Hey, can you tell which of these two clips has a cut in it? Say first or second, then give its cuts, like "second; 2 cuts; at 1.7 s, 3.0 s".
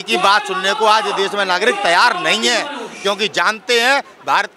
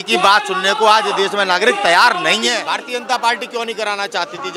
second; 1 cut; at 2.7 s